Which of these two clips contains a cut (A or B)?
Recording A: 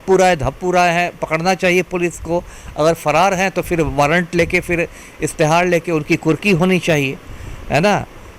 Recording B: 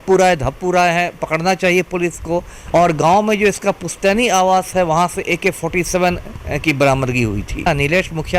B